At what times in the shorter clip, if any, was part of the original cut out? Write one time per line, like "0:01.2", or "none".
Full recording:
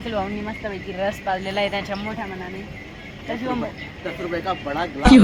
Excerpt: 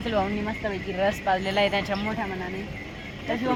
none